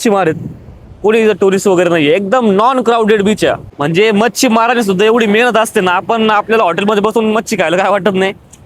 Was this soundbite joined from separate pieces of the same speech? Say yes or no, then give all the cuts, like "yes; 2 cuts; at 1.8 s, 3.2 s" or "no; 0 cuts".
yes; 1 cut; at 3.7 s